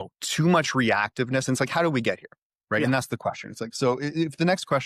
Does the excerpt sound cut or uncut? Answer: uncut